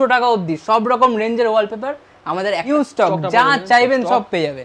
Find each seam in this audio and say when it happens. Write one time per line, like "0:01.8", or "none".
0:02.7